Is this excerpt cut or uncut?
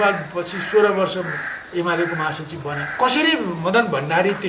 cut